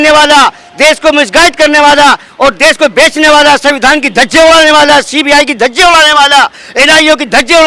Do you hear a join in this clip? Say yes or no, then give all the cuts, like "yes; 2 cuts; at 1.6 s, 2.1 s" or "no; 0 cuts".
no; 0 cuts